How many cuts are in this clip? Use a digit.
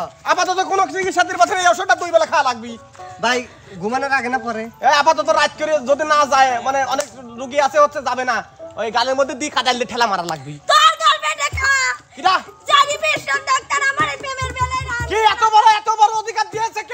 0